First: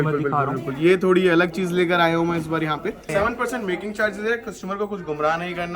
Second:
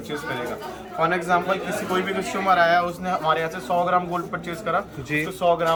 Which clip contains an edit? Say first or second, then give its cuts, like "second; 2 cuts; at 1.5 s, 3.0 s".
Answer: first; 1 cut; at 3.0 s